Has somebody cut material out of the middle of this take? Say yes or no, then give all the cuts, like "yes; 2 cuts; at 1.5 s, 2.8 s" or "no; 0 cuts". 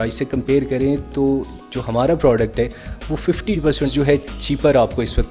no; 0 cuts